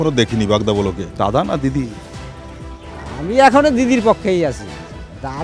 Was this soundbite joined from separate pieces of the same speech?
yes; 1 cut; at 1.0 s

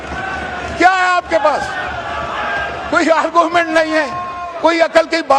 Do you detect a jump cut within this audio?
no; 0 cuts

